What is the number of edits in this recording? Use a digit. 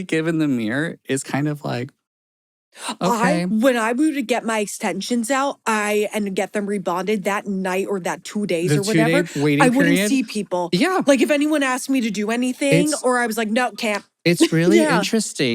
1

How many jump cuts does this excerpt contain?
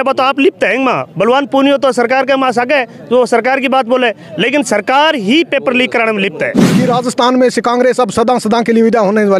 1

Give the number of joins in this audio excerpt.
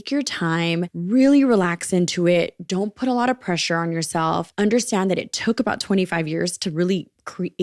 2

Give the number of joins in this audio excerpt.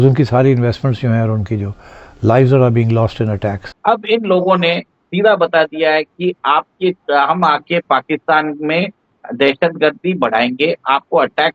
1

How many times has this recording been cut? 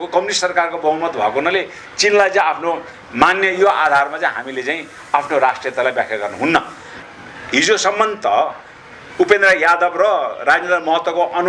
1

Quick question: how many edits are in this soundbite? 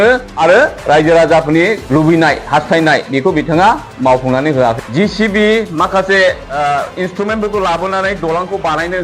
2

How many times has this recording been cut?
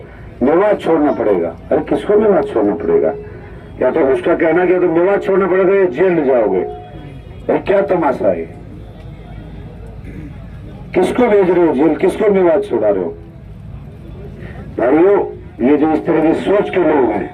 0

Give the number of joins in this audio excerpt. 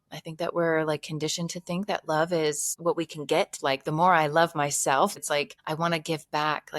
3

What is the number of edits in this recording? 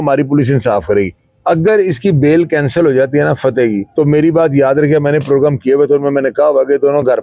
2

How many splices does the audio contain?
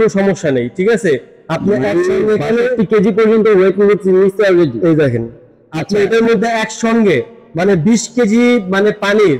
0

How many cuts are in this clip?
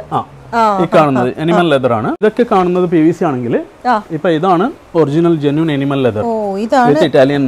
1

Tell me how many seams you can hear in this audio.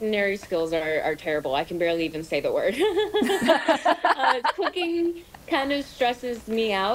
0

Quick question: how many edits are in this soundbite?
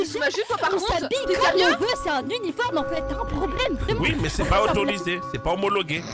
0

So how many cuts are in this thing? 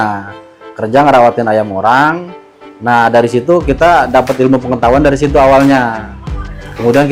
0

